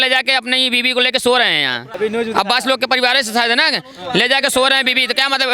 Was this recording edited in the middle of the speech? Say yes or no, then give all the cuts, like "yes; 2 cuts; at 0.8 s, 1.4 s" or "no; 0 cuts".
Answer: yes; 1 cut; at 1.8 s